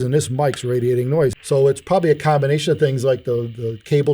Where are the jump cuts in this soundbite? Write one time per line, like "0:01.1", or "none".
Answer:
0:01.4